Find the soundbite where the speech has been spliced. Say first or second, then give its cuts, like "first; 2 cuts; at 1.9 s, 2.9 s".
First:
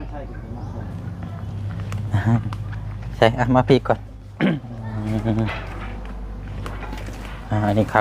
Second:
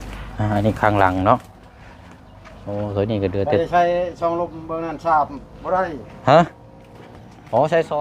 first; 1 cut; at 4.7 s